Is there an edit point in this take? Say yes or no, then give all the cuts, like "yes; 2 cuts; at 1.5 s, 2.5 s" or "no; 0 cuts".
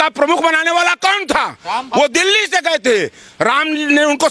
no; 0 cuts